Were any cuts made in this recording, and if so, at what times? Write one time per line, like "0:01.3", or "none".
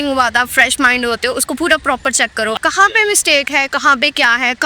0:02.6